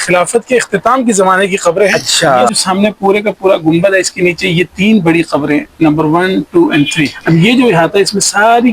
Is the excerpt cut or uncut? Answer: cut